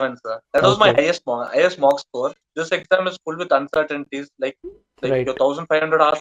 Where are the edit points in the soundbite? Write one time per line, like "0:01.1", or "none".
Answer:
0:02.4